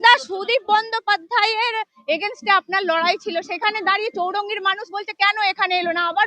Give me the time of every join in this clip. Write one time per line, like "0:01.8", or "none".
none